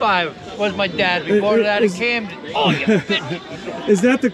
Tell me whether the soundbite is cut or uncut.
uncut